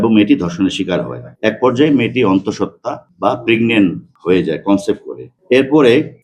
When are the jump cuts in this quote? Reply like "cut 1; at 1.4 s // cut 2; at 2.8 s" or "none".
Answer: cut 1; at 1.2 s // cut 2; at 4.1 s